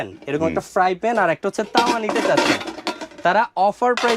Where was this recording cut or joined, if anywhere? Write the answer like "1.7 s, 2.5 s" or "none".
none